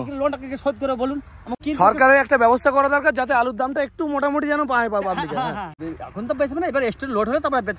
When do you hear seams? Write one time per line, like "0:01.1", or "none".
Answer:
0:01.6
0:05.7